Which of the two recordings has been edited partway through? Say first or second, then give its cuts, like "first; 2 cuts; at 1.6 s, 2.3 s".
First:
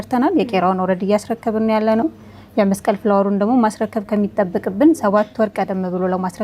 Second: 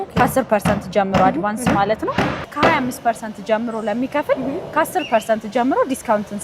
second; 1 cut; at 2.5 s